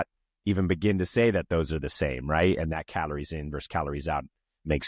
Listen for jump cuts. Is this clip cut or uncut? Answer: uncut